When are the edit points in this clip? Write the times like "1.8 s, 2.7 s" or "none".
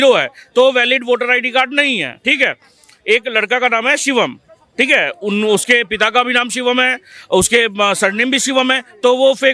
none